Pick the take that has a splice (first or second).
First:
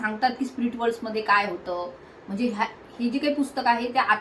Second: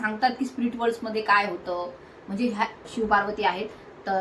second